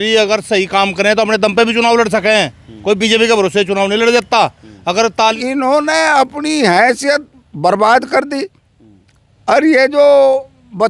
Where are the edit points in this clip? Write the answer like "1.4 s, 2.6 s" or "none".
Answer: 5.4 s

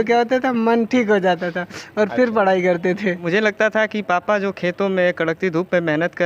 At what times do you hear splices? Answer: 3.2 s

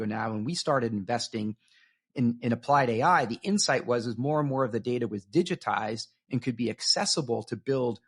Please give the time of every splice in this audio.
none

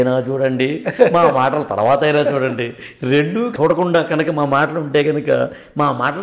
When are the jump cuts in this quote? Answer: 3.5 s

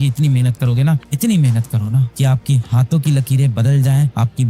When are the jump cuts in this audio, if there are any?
none

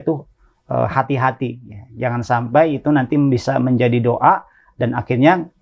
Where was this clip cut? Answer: none

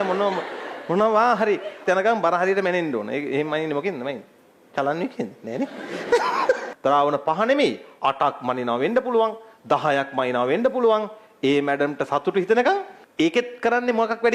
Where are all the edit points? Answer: 1.8 s, 6.7 s, 13.0 s

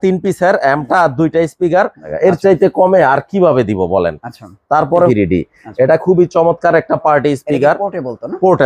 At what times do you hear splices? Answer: 2.0 s, 5.1 s

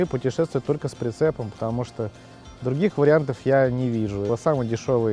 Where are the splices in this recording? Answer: 4.2 s

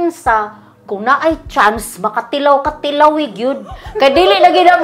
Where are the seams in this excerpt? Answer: none

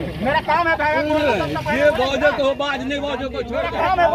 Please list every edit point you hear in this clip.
none

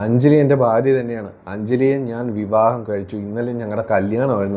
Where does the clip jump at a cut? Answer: none

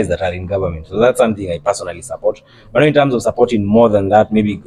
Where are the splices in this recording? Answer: none

